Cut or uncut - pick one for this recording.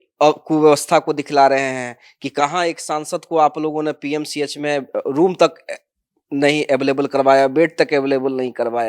uncut